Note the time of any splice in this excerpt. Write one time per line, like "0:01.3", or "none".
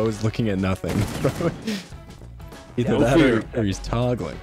none